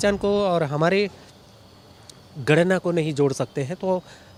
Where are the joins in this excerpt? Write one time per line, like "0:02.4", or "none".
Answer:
none